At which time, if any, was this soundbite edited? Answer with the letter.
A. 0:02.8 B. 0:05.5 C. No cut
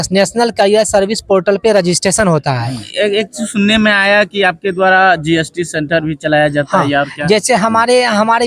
A